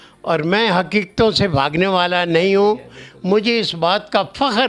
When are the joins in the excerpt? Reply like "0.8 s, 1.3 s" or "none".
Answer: none